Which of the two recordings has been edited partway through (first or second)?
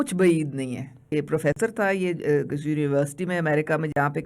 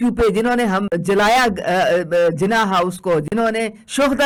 first